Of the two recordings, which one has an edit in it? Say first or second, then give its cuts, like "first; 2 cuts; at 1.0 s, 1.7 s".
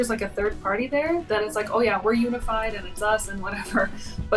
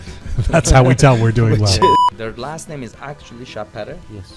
second; 1 cut; at 2.1 s